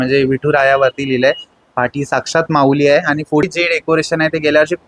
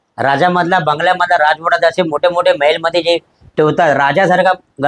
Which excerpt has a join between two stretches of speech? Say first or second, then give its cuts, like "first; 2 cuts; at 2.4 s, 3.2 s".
first; 1 cut; at 3.4 s